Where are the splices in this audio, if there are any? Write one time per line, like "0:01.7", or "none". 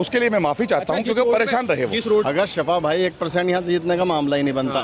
0:02.2